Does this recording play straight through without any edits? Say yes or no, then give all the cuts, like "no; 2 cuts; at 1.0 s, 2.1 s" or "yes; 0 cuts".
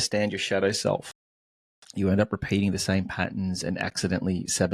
yes; 0 cuts